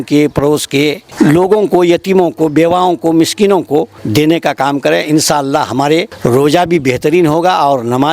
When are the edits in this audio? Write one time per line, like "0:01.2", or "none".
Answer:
0:01.0
0:04.0
0:06.1